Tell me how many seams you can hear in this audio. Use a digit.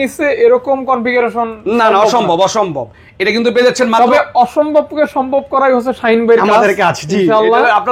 0